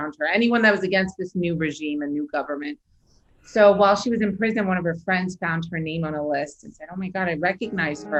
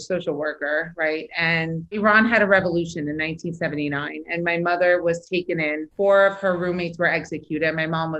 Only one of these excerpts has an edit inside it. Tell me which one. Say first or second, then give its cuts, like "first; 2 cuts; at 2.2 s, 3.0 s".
second; 2 cuts; at 2.0 s, 5.9 s